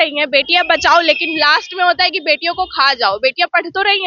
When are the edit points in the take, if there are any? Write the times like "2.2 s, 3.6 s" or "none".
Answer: none